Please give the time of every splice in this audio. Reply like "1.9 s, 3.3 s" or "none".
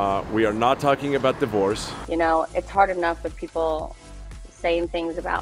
none